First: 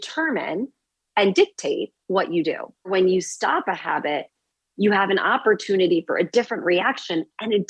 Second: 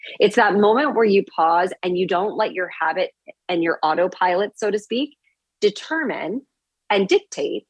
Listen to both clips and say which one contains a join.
first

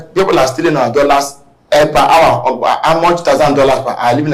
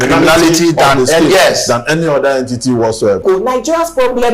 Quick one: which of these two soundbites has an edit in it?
second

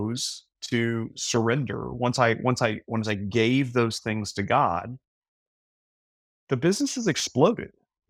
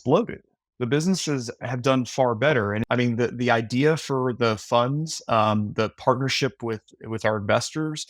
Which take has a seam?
second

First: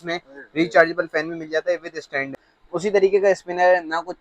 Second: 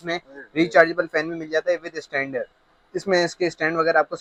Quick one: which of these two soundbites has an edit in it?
first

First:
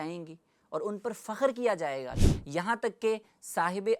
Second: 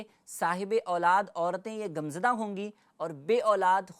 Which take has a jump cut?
first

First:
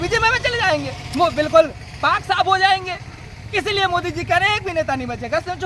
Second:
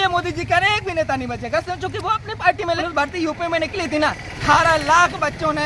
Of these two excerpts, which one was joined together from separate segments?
second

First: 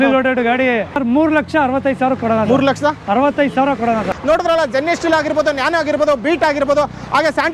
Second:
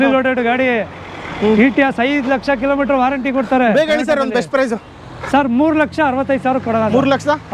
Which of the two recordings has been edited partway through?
first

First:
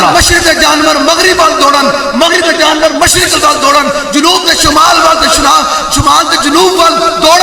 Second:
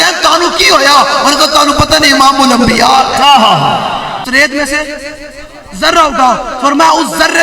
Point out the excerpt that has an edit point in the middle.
second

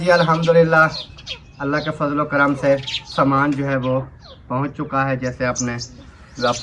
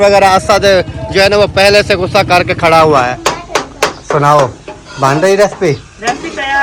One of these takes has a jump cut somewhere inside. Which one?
second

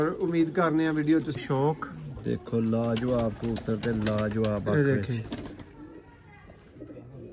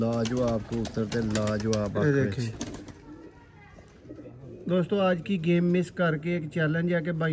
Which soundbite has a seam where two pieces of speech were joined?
first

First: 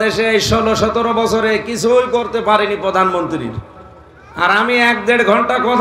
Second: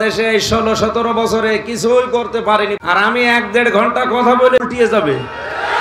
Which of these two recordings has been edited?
second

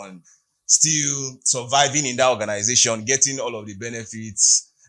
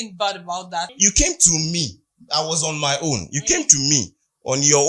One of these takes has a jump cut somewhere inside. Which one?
second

